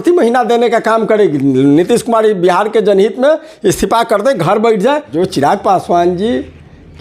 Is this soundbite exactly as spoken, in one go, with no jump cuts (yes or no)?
no